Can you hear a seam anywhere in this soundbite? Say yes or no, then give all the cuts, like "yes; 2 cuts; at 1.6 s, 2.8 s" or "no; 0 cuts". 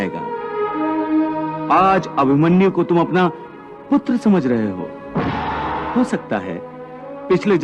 yes; 1 cut; at 5.9 s